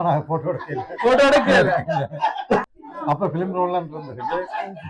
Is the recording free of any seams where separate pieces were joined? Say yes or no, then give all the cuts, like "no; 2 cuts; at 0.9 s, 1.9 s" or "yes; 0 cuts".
yes; 0 cuts